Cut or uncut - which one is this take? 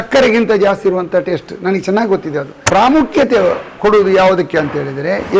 cut